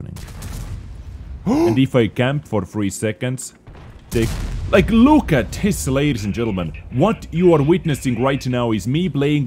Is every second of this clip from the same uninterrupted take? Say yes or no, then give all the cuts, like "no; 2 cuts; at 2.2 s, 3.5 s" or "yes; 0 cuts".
no; 1 cut; at 1.7 s